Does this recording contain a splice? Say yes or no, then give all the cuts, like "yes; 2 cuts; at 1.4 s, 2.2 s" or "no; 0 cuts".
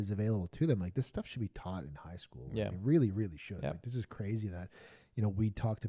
no; 0 cuts